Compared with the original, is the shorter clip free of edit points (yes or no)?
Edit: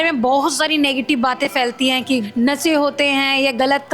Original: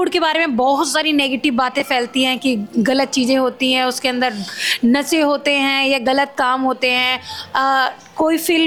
no